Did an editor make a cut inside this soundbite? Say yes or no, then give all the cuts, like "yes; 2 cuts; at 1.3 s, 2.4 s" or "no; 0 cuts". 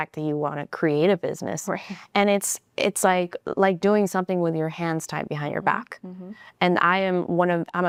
no; 0 cuts